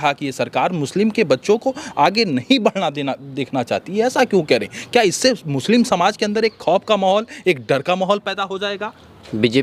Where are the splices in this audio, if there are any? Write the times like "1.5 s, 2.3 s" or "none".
none